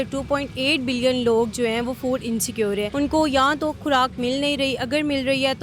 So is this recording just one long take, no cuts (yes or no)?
no